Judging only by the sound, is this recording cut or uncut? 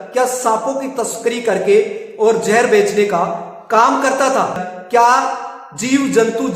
cut